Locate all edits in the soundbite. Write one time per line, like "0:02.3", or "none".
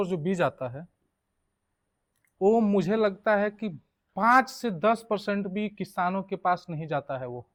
none